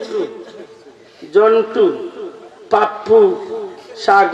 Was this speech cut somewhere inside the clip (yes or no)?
no